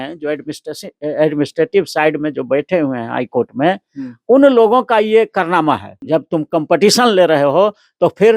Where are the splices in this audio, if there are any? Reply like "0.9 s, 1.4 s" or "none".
5.9 s